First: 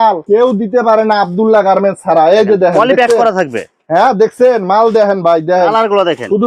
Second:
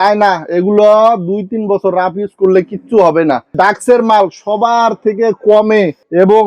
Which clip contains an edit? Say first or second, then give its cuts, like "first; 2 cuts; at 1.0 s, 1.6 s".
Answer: second; 1 cut; at 3.5 s